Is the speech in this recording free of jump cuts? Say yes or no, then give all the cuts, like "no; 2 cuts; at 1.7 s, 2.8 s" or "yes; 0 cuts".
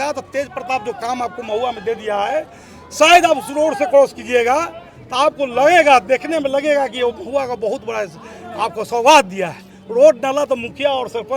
yes; 0 cuts